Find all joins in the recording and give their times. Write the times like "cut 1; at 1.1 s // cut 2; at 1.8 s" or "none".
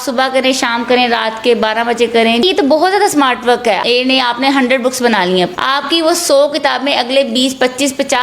cut 1; at 2.4 s // cut 2; at 3.8 s // cut 3; at 5.5 s